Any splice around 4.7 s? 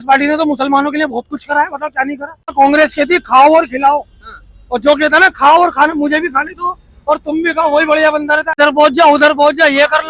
no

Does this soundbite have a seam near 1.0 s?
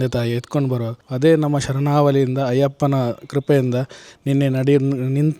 yes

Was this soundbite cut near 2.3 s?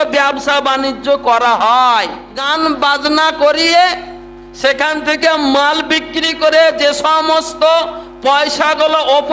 yes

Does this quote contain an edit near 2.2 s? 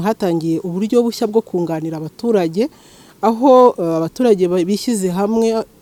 no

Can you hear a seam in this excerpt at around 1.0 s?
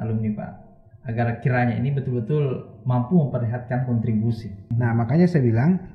no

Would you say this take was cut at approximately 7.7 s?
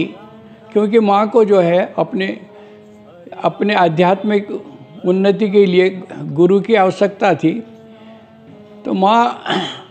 no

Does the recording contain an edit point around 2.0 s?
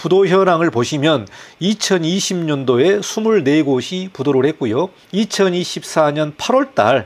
no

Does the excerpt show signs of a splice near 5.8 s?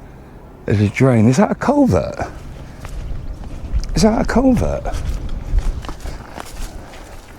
yes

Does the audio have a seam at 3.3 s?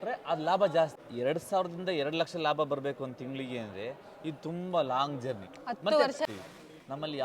no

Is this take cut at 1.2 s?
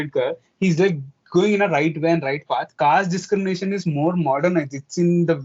no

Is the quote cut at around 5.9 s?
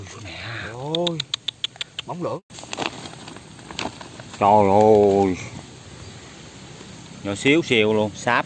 no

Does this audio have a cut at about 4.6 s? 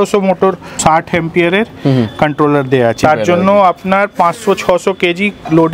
no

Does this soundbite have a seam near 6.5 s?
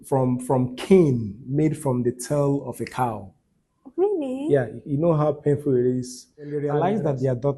yes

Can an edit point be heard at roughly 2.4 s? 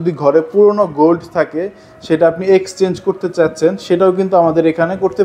no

